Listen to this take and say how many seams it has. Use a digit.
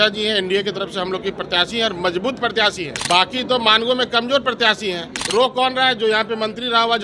2